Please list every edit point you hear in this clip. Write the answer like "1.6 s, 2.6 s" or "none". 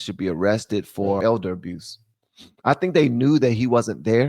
1.2 s